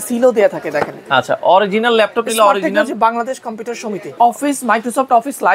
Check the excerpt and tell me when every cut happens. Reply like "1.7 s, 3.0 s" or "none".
4.1 s

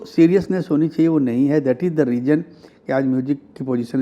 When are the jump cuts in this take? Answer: none

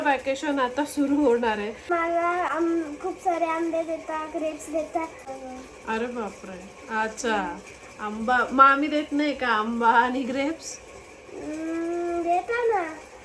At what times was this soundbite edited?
1.9 s, 5.3 s

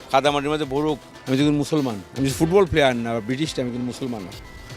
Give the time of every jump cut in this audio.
1.1 s

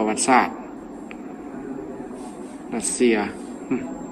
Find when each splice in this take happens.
none

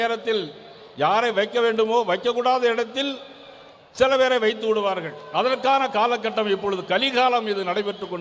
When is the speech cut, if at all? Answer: none

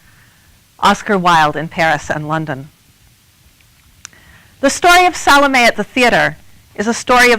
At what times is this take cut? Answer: 5.2 s

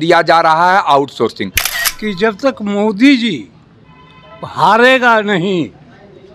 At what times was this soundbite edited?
1.6 s

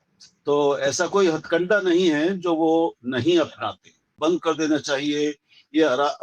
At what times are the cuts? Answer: 4.2 s

